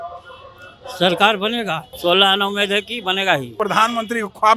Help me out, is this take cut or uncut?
cut